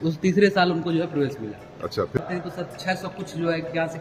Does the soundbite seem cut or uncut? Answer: cut